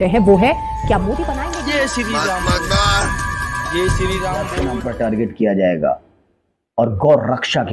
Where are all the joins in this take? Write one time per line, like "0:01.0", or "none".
0:01.3
0:04.7